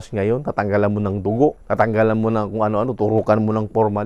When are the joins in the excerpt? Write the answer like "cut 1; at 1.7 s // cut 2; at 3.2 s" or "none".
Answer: cut 1; at 1.6 s